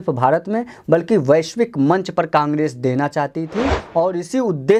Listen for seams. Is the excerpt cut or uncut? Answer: uncut